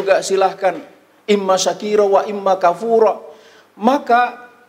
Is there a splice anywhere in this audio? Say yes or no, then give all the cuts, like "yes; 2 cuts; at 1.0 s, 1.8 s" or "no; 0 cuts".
no; 0 cuts